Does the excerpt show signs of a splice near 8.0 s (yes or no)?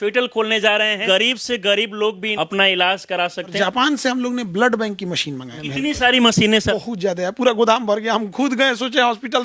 no